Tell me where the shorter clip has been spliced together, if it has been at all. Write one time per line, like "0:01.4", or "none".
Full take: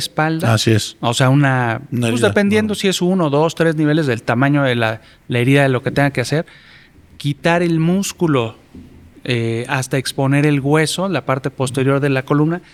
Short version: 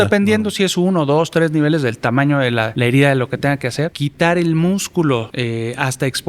0:02.7
0:04.0
0:05.3